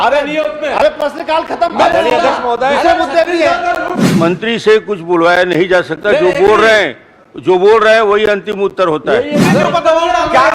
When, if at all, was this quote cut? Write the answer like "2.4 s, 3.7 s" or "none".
4.0 s, 9.4 s